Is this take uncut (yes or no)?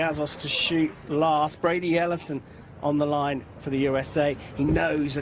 yes